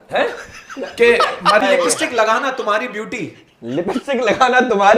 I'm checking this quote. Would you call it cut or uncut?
cut